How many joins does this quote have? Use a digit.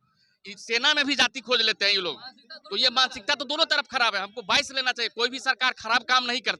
0